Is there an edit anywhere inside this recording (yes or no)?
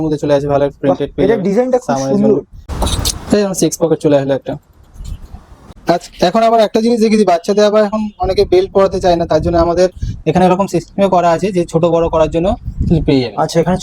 yes